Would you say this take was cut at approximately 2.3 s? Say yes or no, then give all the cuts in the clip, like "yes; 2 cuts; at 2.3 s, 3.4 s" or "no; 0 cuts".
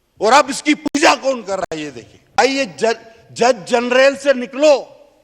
no; 0 cuts